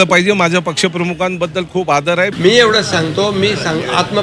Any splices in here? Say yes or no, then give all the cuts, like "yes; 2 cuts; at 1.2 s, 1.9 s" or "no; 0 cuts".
yes; 1 cut; at 2.3 s